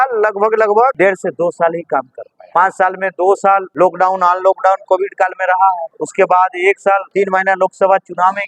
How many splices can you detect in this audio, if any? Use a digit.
5